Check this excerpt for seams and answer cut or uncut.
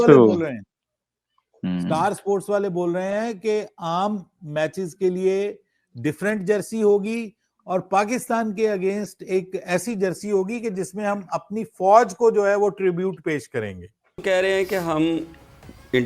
cut